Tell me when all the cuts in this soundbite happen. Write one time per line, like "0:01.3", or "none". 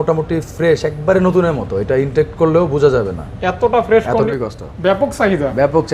0:04.3